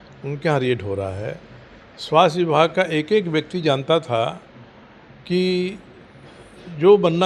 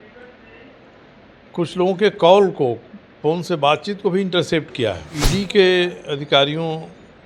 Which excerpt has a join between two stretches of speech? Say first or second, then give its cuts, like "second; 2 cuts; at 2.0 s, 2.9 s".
second; 1 cut; at 5.2 s